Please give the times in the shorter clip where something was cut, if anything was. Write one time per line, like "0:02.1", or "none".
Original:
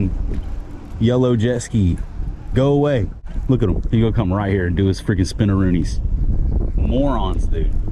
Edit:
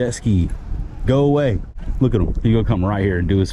none